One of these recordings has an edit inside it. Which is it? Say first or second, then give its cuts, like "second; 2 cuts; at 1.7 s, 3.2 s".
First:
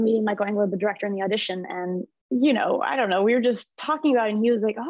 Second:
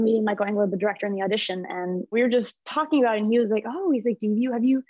second; 1 cut; at 2.1 s